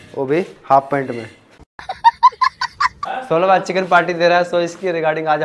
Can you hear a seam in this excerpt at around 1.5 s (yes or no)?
no